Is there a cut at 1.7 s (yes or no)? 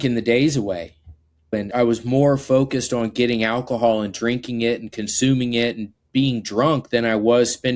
yes